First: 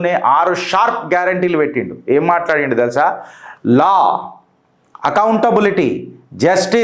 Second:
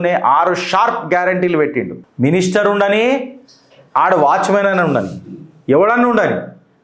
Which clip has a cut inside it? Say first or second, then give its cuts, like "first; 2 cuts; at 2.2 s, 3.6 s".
second; 1 cut; at 1.9 s